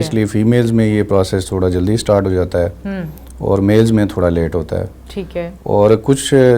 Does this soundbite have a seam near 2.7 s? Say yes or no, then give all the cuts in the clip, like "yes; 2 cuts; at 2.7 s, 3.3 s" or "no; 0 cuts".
no; 0 cuts